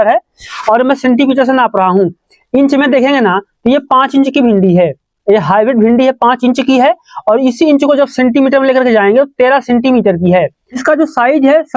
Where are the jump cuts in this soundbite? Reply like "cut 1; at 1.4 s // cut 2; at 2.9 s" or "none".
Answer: cut 1; at 10.8 s